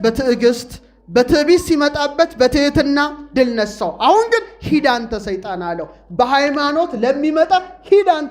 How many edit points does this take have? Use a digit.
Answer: 0